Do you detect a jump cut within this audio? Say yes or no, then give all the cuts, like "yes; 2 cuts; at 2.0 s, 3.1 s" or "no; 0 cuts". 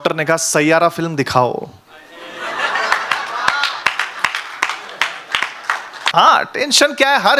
yes; 1 cut; at 6.1 s